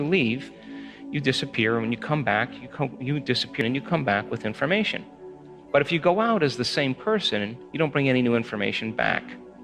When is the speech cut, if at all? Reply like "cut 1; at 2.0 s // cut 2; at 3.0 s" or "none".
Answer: cut 1; at 3.6 s